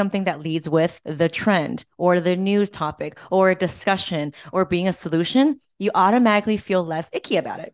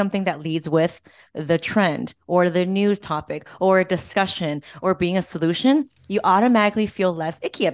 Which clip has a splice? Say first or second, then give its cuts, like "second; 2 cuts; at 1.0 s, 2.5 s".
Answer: first; 1 cut; at 1.0 s